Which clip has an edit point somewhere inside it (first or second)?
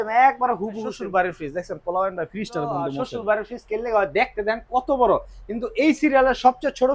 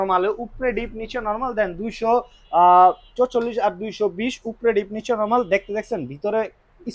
first